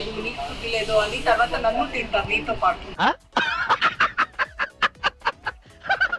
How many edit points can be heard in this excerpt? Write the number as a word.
zero